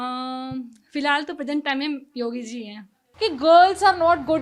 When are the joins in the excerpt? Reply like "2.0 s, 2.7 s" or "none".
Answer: 3.0 s